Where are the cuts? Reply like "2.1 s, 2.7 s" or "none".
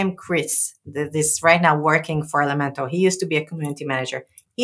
none